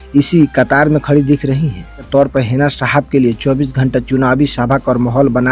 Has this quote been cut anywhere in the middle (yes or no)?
yes